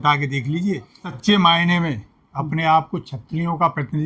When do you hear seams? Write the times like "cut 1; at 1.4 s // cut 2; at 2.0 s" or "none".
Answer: cut 1; at 1.1 s